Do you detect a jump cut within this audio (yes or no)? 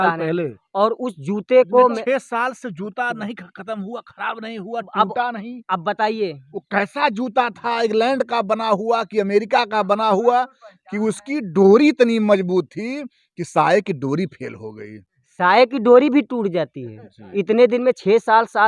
no